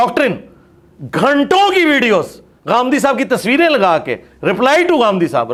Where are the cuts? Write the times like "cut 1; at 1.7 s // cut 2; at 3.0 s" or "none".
none